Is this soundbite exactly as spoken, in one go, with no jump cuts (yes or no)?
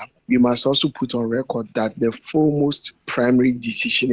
no